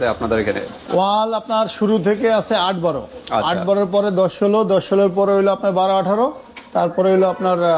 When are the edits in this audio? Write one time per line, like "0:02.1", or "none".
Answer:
none